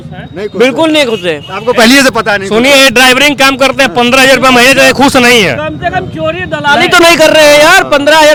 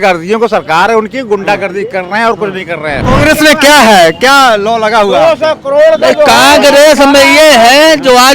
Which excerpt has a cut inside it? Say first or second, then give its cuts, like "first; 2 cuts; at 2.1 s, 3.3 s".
second; 1 cut; at 3.0 s